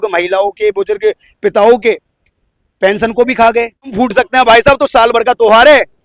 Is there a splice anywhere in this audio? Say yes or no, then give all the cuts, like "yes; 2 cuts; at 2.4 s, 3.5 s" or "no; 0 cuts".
yes; 1 cut; at 3.9 s